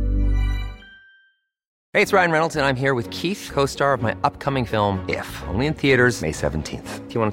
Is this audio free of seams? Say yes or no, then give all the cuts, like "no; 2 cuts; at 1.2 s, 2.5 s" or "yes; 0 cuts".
yes; 0 cuts